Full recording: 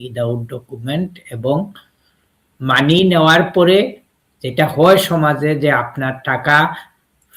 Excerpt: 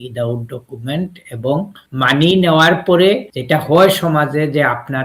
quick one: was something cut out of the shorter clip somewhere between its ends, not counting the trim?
yes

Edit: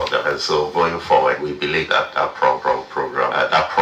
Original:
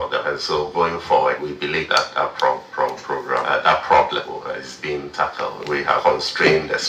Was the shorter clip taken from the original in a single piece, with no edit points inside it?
no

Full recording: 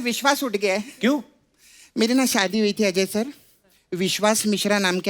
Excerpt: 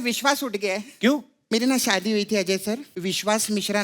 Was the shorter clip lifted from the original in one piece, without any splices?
no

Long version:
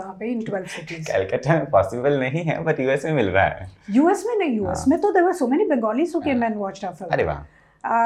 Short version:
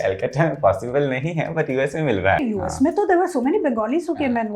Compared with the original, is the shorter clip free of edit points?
no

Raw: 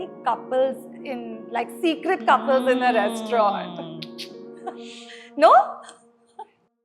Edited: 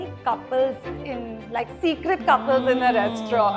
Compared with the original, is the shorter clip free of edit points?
yes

